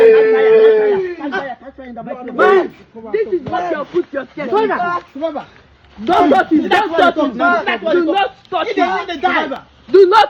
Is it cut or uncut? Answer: uncut